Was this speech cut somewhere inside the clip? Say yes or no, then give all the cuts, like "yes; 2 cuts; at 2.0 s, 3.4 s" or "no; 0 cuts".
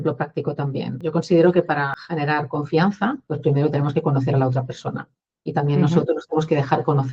yes; 3 cuts; at 0.9 s, 2.0 s, 3.3 s